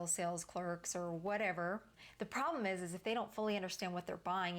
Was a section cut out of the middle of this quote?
yes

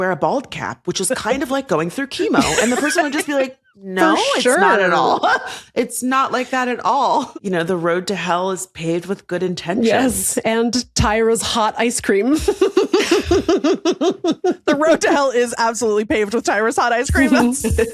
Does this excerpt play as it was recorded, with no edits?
no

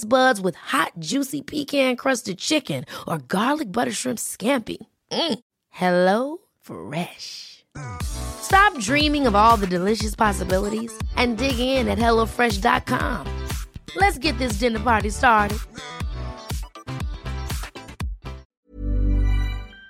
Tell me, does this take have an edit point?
yes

